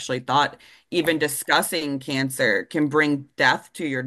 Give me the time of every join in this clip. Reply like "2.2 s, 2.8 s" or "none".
none